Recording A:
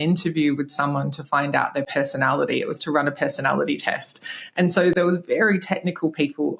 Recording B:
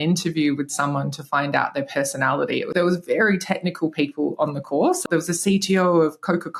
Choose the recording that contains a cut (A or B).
B